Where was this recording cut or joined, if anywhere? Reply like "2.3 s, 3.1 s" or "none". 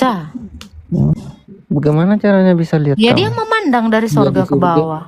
1.1 s